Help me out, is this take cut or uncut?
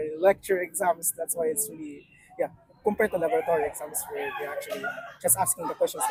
uncut